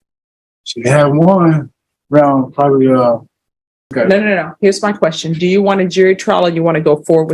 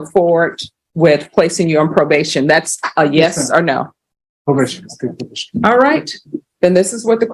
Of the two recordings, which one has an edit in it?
first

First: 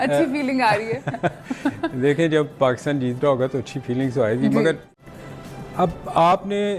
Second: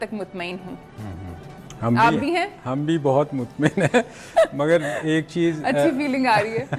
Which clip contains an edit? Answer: first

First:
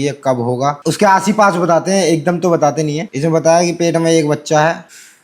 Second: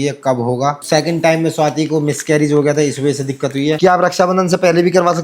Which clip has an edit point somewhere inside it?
second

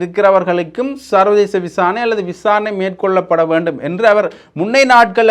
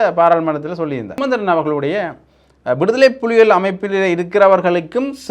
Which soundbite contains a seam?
second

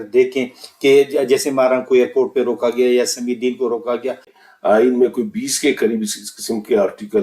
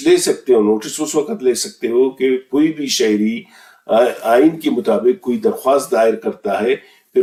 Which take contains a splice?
first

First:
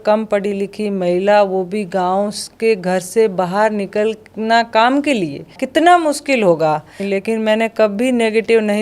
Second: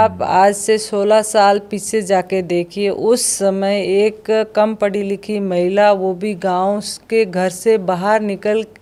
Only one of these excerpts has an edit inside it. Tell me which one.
first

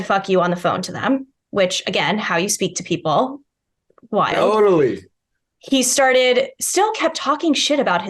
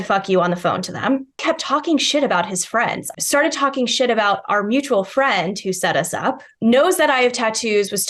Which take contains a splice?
second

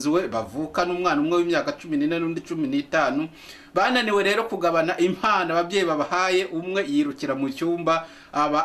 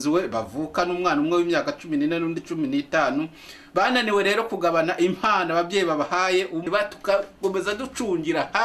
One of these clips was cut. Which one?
second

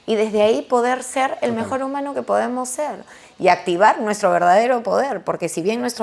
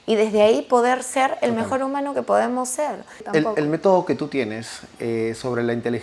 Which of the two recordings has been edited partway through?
second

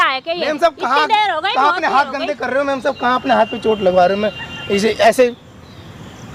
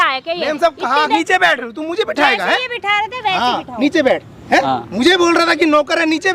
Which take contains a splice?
second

